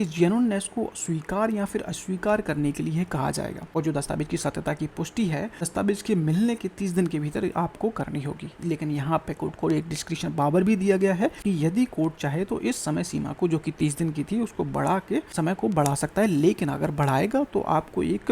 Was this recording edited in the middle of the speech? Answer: yes; 4 cuts; at 3.6 s, 5.6 s, 11.4 s, 15.3 s

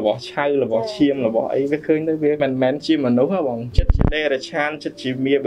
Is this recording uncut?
no; 2 cuts; at 2.4 s, 3.8 s

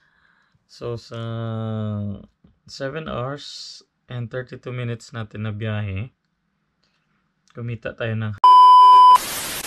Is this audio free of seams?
no; 1 cut; at 8.4 s

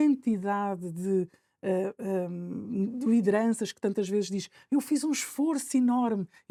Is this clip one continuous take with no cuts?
yes; 0 cuts

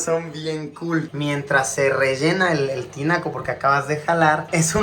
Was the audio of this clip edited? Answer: yes; 1 cut; at 1.1 s

